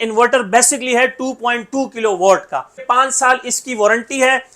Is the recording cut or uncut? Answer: cut